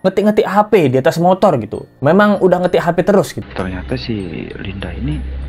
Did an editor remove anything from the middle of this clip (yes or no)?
yes